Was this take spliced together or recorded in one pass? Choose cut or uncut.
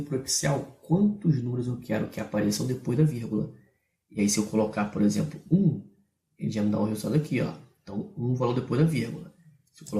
cut